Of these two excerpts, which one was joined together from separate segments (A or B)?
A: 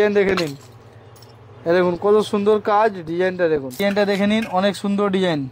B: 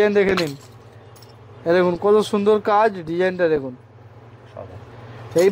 A